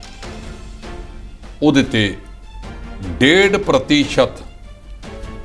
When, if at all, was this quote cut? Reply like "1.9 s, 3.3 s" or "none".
none